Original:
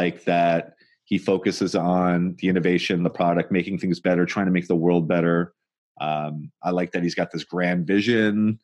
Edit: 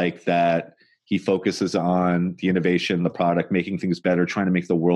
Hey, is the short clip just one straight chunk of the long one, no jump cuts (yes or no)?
yes